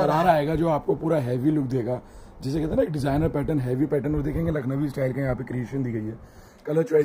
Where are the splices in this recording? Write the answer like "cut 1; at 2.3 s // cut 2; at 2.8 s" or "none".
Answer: none